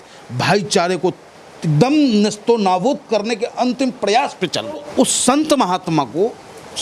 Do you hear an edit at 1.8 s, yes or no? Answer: no